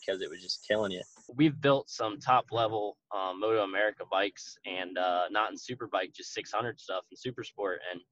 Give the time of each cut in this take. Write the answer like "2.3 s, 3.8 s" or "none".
1.2 s

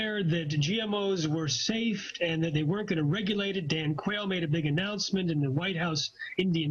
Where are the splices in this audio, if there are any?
1.5 s

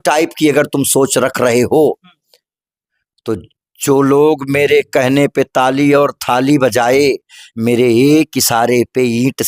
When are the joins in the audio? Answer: none

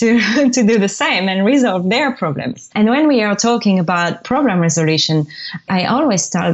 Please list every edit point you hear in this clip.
2.7 s, 4.2 s, 5.7 s

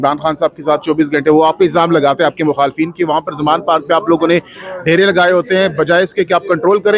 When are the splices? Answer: none

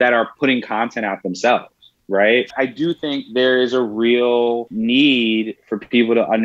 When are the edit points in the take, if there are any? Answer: 2.5 s, 4.7 s

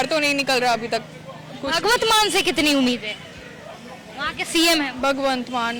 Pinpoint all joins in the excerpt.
none

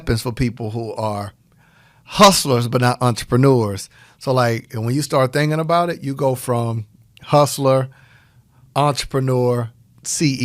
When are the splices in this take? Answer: none

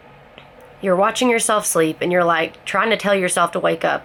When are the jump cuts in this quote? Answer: none

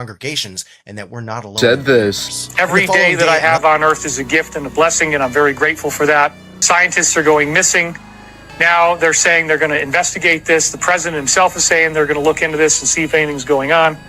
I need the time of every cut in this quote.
1.6 s, 6.5 s

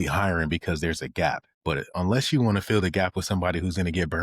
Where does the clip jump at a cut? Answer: 1.8 s

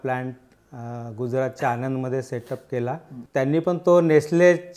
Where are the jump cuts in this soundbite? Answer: 3.2 s

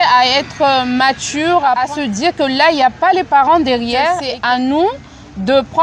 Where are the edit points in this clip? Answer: 1.8 s, 4.3 s

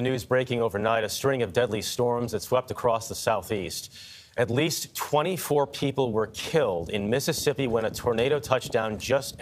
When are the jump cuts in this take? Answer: none

